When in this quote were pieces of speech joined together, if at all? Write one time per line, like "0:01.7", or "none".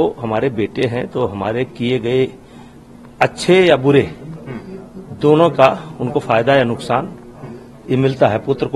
none